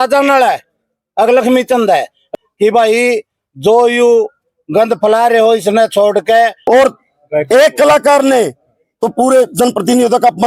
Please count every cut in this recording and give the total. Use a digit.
2